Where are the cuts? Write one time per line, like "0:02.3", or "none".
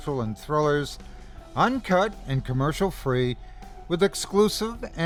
none